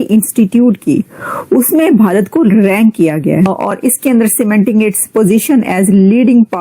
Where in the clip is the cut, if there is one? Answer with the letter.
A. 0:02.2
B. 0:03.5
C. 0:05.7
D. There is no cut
B